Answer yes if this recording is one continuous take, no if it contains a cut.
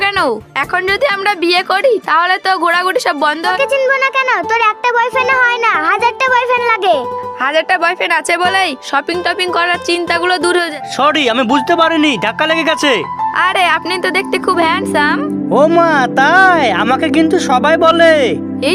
no